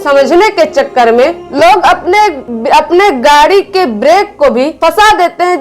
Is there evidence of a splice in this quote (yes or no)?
yes